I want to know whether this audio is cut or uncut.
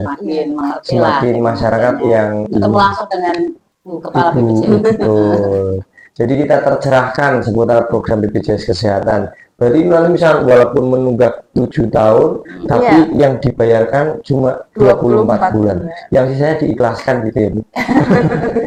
uncut